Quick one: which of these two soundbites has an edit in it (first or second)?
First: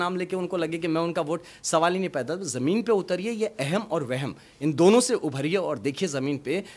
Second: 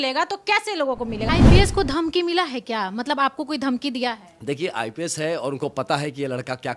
second